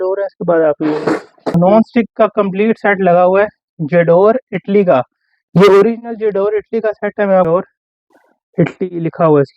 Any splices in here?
yes; 2 cuts; at 1.5 s, 7.5 s

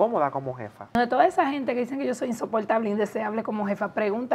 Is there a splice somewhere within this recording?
yes; 1 cut; at 0.9 s

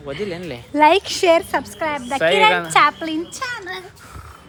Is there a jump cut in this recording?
no; 0 cuts

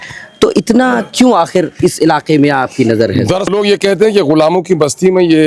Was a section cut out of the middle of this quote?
yes; 1 cut; at 3.5 s

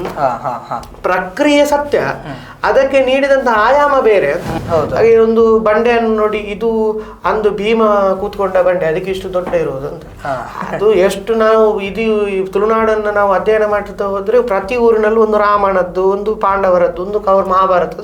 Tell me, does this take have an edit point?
yes; 1 cut; at 4.6 s

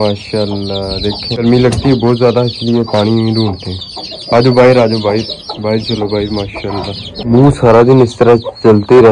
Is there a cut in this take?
yes; 2 cuts; at 1.4 s, 7.1 s

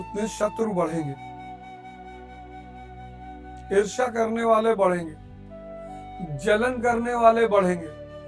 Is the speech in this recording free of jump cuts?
yes; 0 cuts

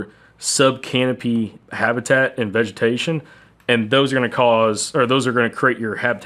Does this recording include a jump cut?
yes; 1 cut; at 1.6 s

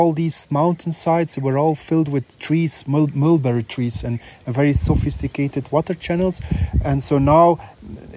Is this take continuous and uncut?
yes; 0 cuts

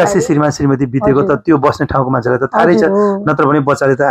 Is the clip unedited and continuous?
yes; 0 cuts

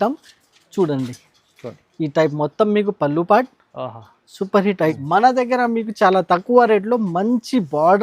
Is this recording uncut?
no; 1 cut; at 5.0 s

